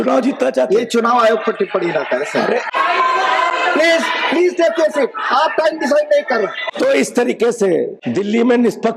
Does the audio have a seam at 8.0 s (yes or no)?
yes